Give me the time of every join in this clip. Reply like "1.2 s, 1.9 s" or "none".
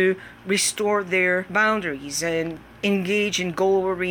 1.5 s, 2.6 s